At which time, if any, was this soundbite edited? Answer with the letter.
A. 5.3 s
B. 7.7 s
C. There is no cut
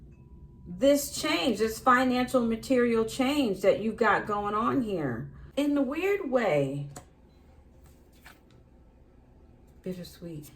A